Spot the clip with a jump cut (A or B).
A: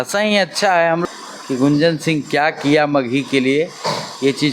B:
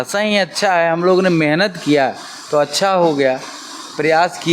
A